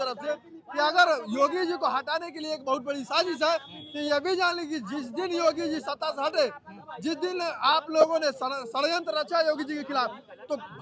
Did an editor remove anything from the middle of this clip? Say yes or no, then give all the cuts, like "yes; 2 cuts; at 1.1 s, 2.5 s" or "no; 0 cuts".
no; 0 cuts